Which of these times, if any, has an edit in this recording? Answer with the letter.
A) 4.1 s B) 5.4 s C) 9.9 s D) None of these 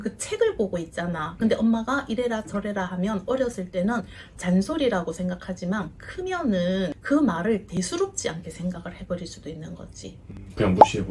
D